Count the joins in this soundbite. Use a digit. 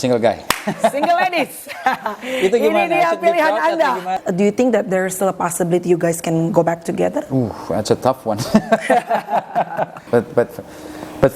2